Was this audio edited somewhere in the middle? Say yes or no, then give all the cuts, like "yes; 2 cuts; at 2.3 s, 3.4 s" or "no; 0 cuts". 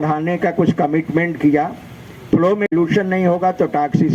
no; 0 cuts